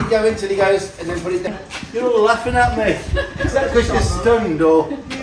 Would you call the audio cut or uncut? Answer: cut